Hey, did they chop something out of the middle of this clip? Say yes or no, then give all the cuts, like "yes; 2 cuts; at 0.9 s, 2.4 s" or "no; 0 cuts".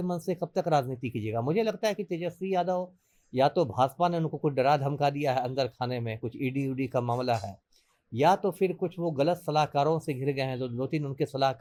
no; 0 cuts